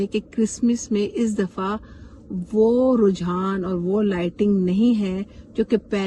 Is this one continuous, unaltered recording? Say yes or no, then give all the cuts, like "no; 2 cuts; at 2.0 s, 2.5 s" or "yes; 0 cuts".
yes; 0 cuts